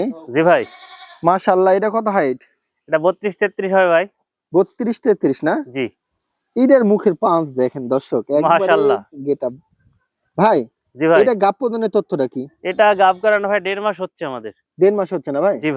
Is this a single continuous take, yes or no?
yes